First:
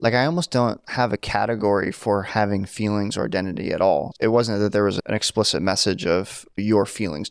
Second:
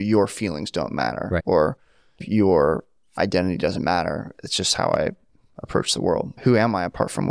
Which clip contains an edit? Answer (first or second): first